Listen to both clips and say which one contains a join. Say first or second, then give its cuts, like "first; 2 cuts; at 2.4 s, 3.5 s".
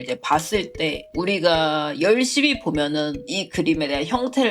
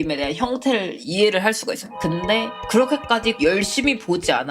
second; 1 cut; at 1.9 s